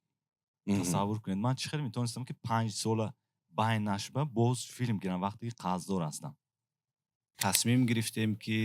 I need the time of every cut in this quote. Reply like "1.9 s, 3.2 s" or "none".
7.2 s